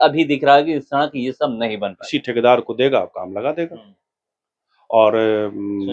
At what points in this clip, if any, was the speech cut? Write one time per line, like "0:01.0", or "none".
0:02.0